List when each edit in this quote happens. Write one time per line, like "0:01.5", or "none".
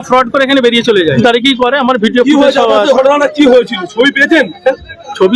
0:01.2